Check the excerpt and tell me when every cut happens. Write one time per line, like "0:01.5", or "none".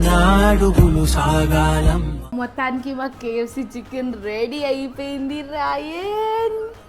0:02.3